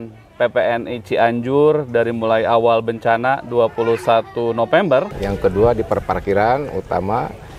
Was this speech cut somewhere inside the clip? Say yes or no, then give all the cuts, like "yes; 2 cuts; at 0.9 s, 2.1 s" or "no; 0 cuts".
yes; 1 cut; at 5.2 s